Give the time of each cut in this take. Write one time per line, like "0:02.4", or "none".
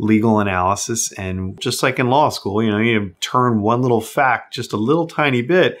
0:01.7